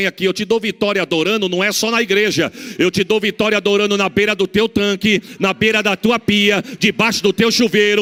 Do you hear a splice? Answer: no; 0 cuts

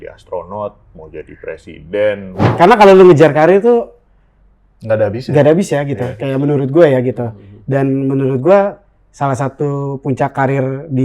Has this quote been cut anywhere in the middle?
yes; 1 cut; at 2.4 s

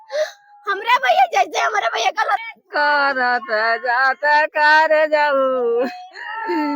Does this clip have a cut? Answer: yes; 1 cut; at 2.4 s

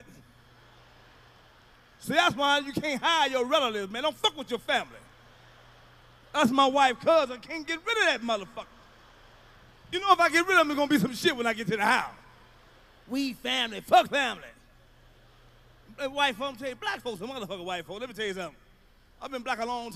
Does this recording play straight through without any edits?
no; 1 cut; at 3.1 s

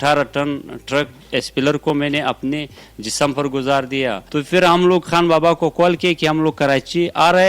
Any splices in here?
yes; 1 cut; at 4.2 s

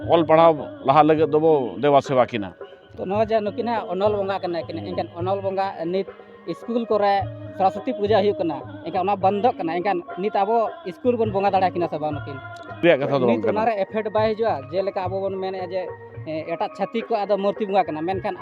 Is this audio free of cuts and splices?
no; 1 cut; at 12.8 s

